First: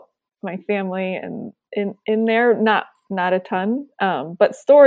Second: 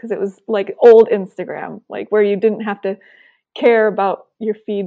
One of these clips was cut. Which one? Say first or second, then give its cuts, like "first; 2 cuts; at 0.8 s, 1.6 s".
first; 1 cut; at 1.6 s